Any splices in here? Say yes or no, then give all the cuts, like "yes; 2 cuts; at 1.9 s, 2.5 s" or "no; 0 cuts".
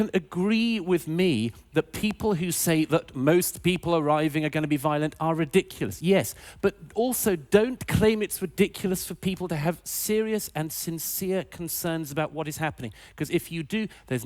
yes; 1 cut; at 12.3 s